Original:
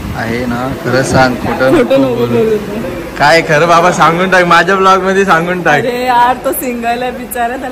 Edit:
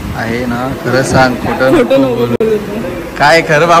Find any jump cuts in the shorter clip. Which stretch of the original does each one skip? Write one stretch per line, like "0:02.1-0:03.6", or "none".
none